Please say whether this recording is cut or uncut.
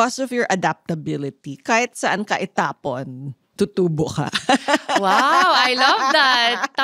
uncut